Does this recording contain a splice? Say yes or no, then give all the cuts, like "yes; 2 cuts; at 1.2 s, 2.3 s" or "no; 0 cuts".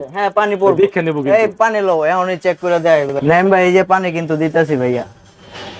yes; 1 cut; at 3.1 s